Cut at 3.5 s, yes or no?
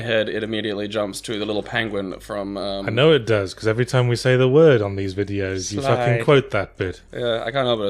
no